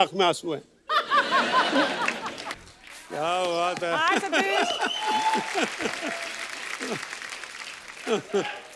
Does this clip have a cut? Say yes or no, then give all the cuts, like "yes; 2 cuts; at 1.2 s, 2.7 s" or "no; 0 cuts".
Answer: yes; 2 cuts; at 2.5 s, 5.0 s